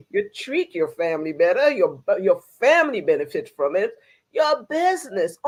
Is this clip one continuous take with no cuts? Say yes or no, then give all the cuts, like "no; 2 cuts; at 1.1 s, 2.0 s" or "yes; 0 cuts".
yes; 0 cuts